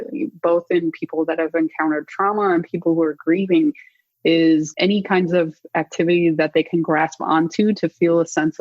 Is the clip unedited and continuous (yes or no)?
no